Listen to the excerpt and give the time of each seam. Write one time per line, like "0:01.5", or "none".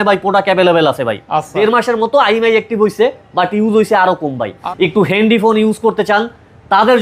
0:01.5
0:04.5